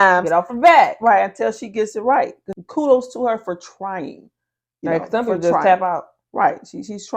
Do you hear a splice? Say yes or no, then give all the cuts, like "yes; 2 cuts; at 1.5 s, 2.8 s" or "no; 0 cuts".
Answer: yes; 1 cut; at 2.5 s